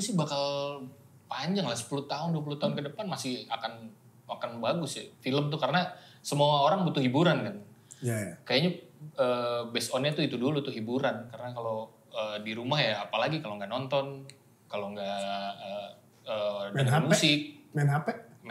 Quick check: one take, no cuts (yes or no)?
yes